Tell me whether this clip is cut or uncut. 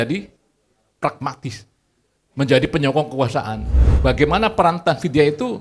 cut